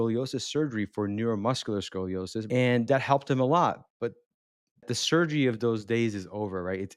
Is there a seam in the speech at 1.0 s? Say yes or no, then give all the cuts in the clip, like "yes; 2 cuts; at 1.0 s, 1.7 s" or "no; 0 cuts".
no; 2 cuts; at 2.5 s, 4.9 s